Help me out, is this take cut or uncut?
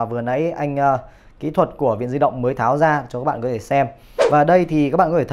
cut